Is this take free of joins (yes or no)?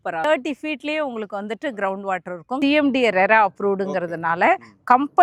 no